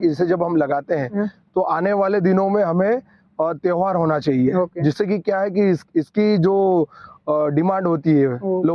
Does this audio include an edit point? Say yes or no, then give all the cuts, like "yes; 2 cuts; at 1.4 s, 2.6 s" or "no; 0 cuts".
no; 0 cuts